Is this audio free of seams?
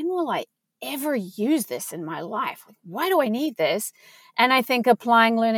yes; 0 cuts

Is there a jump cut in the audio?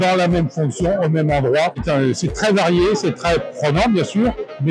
no; 0 cuts

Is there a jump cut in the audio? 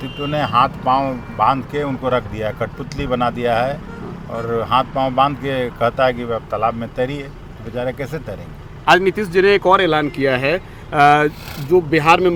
no; 0 cuts

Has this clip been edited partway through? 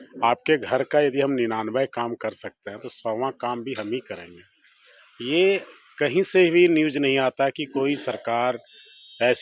no; 0 cuts

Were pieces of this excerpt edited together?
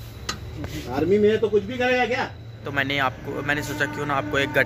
yes; 1 cut; at 2.6 s

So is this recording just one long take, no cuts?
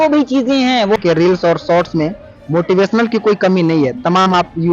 no; 1 cut; at 1.0 s

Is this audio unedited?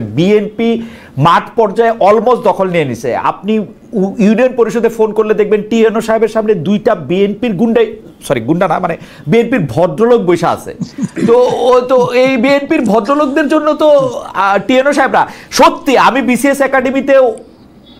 yes; 0 cuts

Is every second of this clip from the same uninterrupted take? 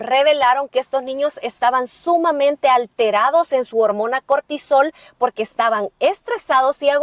yes; 0 cuts

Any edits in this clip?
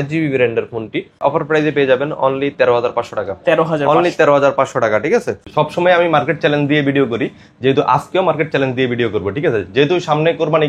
yes; 2 cuts; at 1.2 s, 5.4 s

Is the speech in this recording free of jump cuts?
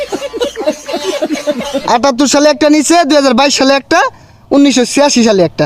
no; 1 cut; at 1.4 s

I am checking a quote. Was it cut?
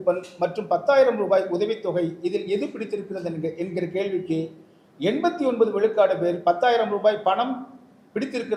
no; 0 cuts

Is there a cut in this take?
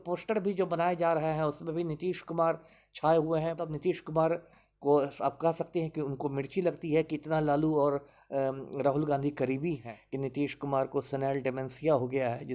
yes; 2 cuts; at 3.7 s, 9.9 s

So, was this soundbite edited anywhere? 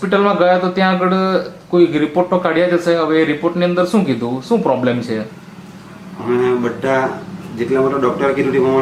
no; 0 cuts

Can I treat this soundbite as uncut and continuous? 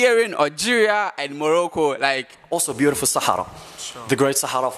no; 1 cut; at 2.4 s

